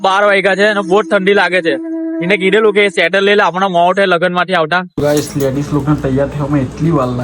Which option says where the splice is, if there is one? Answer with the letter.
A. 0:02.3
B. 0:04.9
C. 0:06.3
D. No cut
B